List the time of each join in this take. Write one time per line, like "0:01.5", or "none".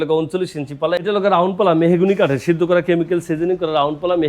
0:01.1